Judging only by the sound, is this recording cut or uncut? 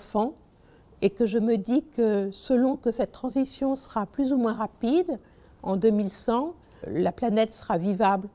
uncut